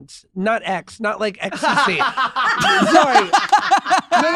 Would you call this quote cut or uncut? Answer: uncut